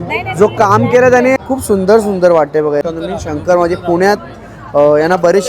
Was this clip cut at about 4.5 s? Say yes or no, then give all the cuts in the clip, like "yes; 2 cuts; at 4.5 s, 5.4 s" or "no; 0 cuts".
no; 2 cuts; at 1.4 s, 2.8 s